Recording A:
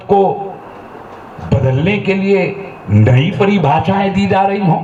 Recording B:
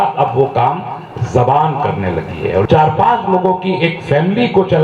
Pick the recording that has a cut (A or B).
B